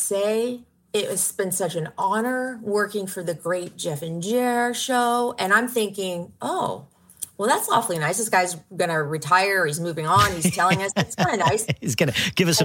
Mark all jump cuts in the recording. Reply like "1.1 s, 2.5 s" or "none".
none